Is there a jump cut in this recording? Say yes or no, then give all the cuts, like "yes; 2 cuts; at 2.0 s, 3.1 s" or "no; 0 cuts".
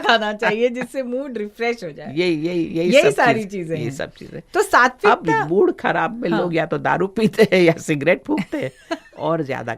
no; 0 cuts